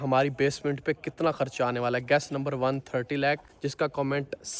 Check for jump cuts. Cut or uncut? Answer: cut